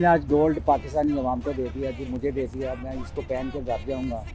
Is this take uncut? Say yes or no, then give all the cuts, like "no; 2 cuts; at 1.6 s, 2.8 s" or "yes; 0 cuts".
yes; 0 cuts